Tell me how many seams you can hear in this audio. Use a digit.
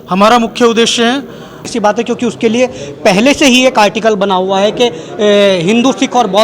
1